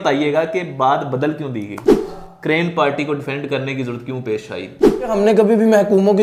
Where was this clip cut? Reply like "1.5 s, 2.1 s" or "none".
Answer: 2.1 s, 5.1 s